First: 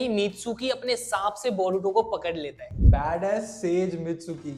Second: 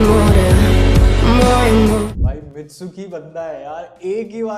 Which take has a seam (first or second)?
second